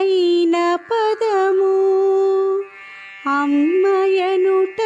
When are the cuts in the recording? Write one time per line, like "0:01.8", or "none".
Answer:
none